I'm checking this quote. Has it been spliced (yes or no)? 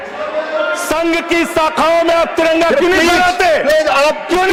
no